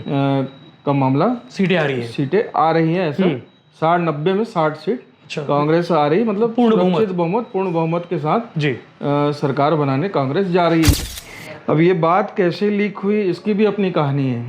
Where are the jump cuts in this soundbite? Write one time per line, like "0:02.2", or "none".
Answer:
0:10.9